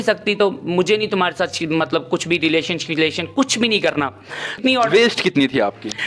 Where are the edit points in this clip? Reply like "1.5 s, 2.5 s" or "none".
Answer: 4.5 s